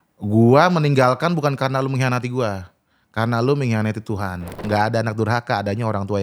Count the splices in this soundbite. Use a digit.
1